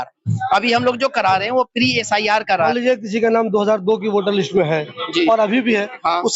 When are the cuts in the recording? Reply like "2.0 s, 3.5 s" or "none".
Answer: 2.6 s